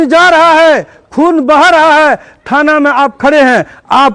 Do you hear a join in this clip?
no; 0 cuts

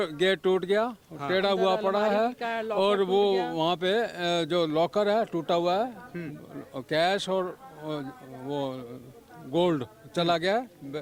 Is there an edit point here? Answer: no; 0 cuts

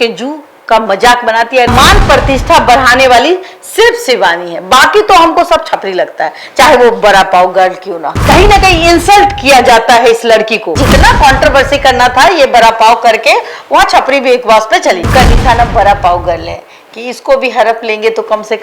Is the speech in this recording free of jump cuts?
no; 4 cuts; at 1.7 s, 8.2 s, 10.8 s, 15.0 s

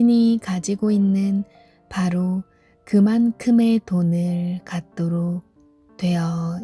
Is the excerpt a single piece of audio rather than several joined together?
yes; 0 cuts

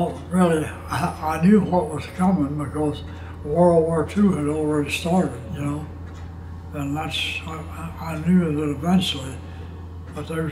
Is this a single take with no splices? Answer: yes; 0 cuts

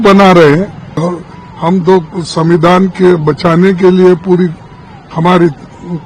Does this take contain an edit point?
yes; 1 cut; at 1.0 s

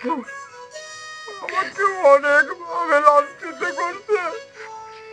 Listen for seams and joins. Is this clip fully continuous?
yes; 0 cuts

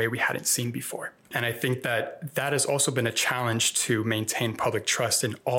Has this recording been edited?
yes; 1 cut; at 1.2 s

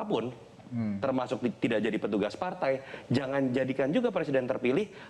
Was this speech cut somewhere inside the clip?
no; 0 cuts

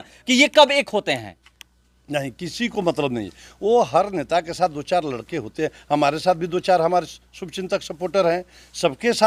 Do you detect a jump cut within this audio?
no; 0 cuts

